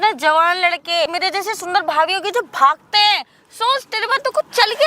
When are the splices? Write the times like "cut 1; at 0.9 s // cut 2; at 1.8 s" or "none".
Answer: cut 1; at 1.1 s